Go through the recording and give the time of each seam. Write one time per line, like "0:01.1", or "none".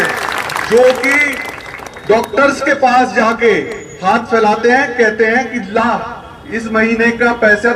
none